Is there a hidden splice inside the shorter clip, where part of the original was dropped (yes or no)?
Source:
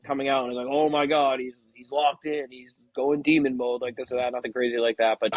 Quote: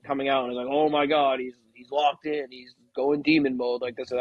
no